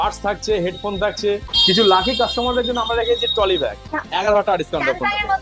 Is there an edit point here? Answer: yes; 2 cuts; at 1.4 s, 3.9 s

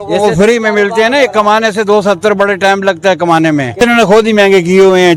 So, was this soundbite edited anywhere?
yes; 1 cut; at 3.8 s

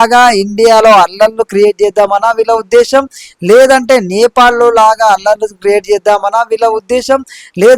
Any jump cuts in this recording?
no; 0 cuts

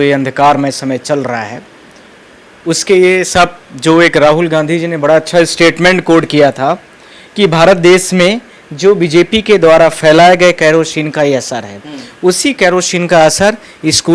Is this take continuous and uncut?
yes; 0 cuts

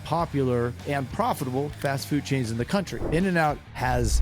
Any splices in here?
yes; 1 cut; at 3.0 s

